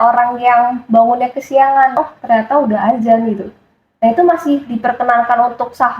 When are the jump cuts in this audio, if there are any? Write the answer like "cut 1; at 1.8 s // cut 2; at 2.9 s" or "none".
cut 1; at 1.9 s